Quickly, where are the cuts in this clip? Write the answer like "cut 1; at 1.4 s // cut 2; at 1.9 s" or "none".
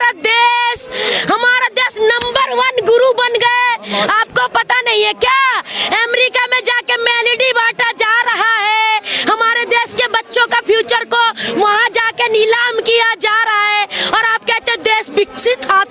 none

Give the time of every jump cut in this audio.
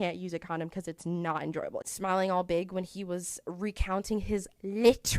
cut 1; at 1.9 s

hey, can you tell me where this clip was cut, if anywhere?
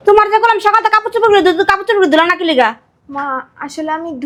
none

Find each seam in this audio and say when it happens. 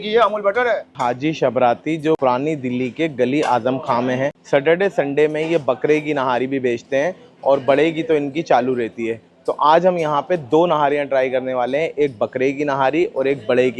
none

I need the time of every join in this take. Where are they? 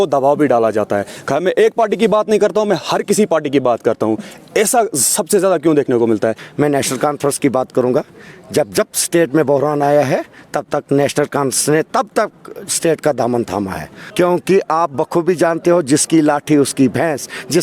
cut 1; at 6.4 s // cut 2; at 14.0 s

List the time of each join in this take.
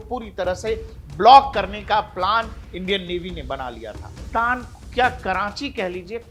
cut 1; at 4.2 s

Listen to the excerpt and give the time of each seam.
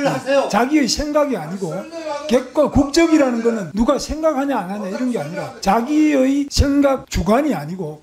cut 1; at 3.7 s // cut 2; at 5.4 s // cut 3; at 6.8 s

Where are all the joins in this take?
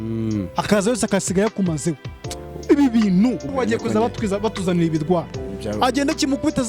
cut 1; at 3.5 s

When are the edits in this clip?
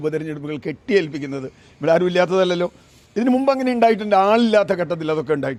none

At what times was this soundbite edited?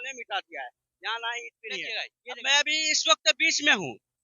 cut 1; at 2.1 s

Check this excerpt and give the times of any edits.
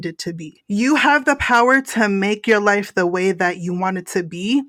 none

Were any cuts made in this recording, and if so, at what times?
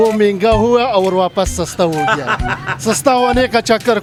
none

